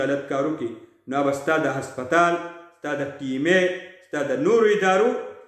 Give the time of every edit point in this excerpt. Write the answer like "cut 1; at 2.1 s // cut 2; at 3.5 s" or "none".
none